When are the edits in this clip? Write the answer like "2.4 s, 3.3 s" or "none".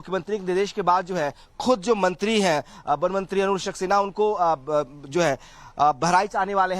3.7 s